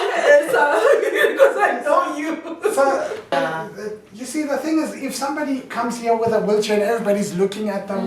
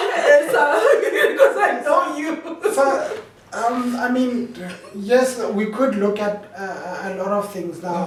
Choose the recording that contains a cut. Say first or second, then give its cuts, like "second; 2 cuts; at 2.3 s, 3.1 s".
first; 1 cut; at 3.3 s